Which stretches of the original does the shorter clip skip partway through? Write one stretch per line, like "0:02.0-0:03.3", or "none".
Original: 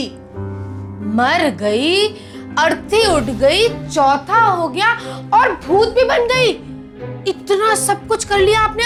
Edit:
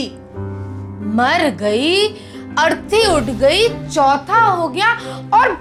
none